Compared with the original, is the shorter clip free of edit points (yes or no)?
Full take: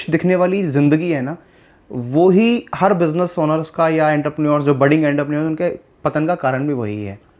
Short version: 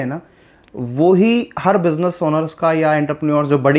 yes